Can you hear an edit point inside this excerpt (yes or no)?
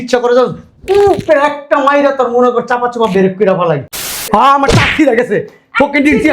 yes